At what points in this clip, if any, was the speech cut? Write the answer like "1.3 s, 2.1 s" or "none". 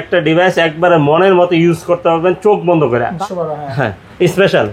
3.1 s